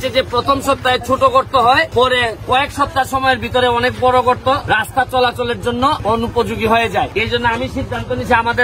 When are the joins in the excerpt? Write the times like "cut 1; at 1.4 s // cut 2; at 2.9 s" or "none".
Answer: cut 1; at 1.9 s // cut 2; at 4.6 s // cut 3; at 6.0 s // cut 4; at 7.1 s